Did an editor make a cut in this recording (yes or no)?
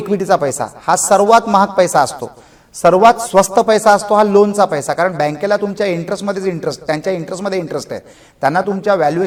no